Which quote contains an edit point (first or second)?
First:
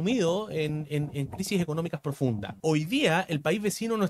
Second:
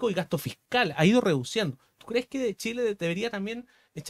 first